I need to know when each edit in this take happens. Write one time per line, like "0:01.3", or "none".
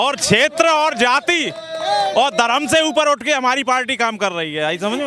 none